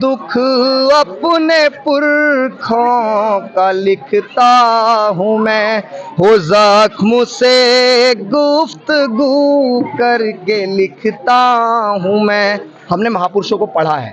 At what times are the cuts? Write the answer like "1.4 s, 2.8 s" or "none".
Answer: none